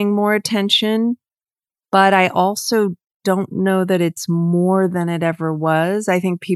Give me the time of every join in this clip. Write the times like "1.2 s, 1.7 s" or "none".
none